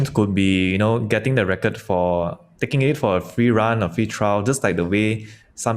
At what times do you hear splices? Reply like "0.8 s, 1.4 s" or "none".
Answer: none